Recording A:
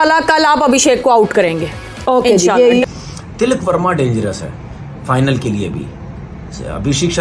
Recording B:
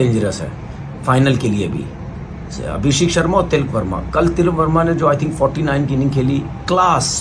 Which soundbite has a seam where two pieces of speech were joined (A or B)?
A